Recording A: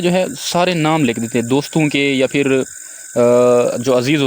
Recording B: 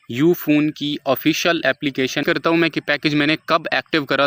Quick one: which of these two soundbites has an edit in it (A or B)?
B